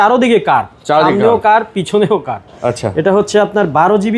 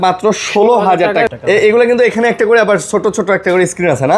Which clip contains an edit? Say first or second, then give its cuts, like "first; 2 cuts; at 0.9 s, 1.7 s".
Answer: second; 1 cut; at 1.3 s